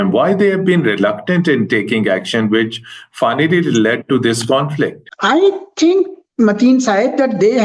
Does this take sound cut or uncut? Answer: uncut